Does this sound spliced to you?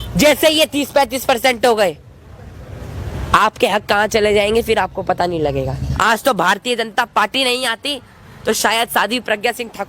yes; 1 cut; at 5.8 s

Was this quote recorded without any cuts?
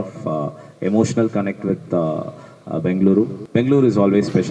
no; 1 cut; at 3.4 s

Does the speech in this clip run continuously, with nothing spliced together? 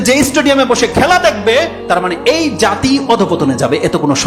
yes; 0 cuts

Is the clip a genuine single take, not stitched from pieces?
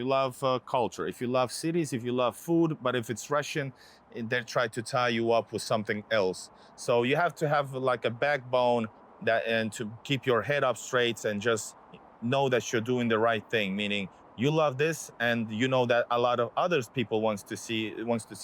yes; 0 cuts

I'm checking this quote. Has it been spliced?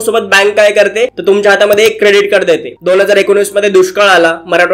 yes; 2 cuts; at 1.2 s, 2.7 s

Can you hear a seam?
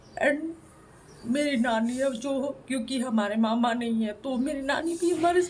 no; 0 cuts

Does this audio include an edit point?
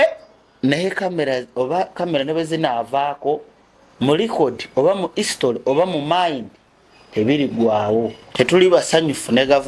yes; 1 cut; at 8.2 s

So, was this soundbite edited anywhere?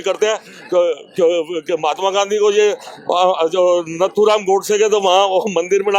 no; 0 cuts

